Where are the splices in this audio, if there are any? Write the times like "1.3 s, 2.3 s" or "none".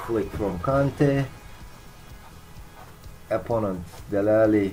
none

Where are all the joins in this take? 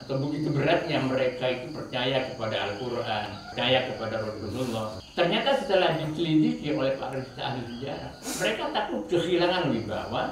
3.4 s, 5.0 s

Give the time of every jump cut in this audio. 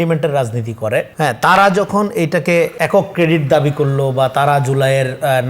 1.1 s, 2.8 s

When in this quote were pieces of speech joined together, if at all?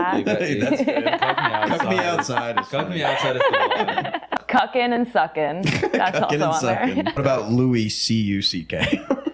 4.5 s, 7.3 s

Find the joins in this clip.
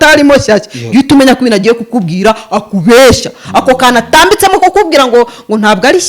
none

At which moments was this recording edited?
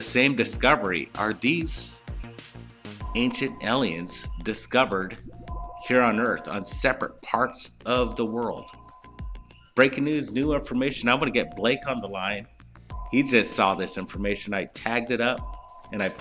1.8 s

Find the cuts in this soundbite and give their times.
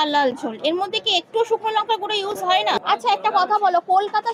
2.8 s

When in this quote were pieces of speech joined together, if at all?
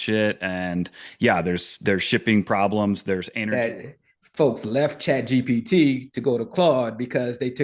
3.3 s

